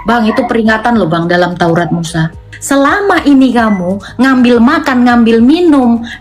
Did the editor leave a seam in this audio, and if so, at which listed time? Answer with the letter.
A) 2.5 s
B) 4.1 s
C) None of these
A